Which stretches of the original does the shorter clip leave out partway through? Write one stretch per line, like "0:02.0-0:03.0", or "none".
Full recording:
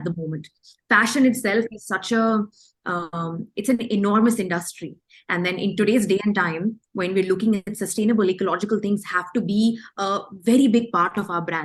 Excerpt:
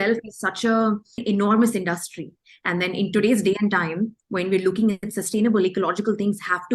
0:02.7-0:03.8